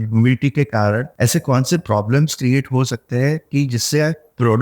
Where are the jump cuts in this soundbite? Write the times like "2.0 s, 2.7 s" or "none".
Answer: 1.1 s